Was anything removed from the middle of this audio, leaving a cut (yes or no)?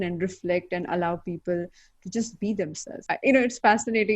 yes